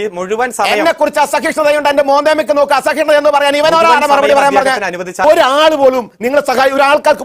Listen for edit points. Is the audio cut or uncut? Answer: cut